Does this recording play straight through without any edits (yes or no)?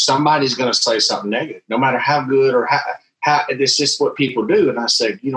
yes